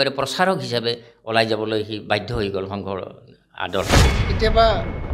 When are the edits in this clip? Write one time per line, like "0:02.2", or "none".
0:04.1